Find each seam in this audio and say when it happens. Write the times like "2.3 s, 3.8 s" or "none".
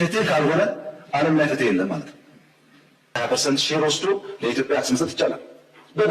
3.2 s

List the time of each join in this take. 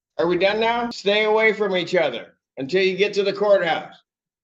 0.9 s

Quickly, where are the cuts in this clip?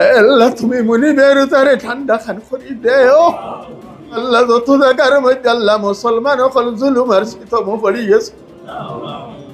4.2 s

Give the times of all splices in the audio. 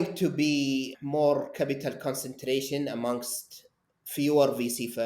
1.0 s

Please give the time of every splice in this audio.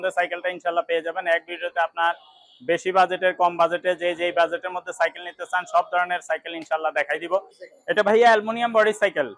7.6 s

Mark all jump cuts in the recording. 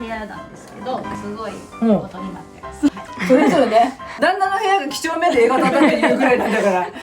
2.9 s

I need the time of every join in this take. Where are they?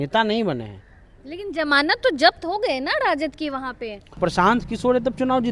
4.2 s

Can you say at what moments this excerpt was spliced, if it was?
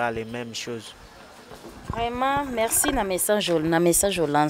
none

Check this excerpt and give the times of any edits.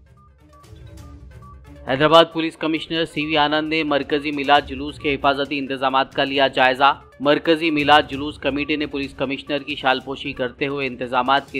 1.0 s

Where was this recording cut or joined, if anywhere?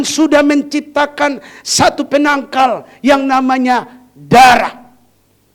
none

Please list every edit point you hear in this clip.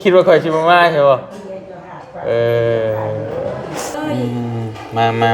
4.0 s

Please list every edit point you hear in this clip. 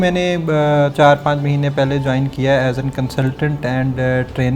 0.9 s

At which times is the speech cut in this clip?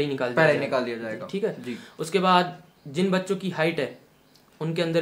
none

